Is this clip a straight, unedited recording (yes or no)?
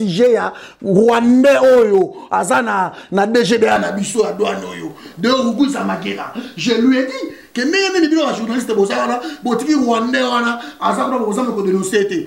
yes